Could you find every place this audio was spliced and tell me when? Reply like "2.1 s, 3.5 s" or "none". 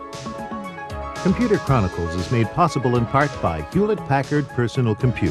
1.2 s